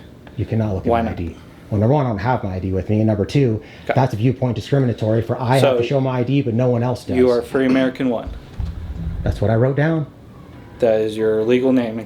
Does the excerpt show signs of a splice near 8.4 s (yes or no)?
no